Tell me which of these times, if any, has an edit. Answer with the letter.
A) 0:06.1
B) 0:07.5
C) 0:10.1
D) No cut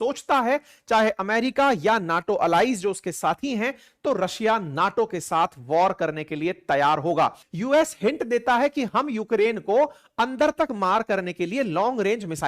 B